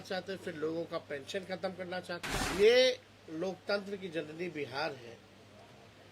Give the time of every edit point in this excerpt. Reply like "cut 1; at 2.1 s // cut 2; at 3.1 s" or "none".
cut 1; at 2.4 s